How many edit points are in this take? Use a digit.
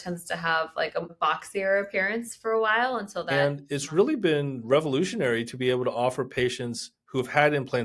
1